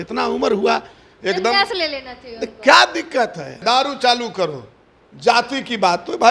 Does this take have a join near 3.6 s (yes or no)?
yes